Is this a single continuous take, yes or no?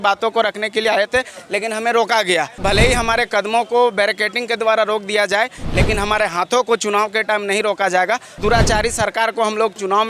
no